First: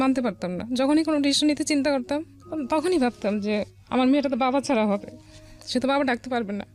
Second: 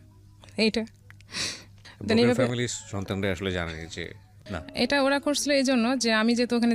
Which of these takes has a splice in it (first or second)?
second